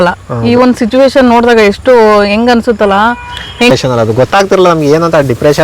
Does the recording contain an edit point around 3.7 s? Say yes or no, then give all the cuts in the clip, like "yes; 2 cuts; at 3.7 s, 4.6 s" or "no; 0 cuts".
yes; 1 cut; at 3.7 s